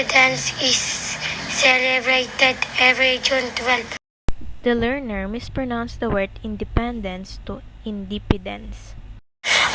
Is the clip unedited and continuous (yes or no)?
yes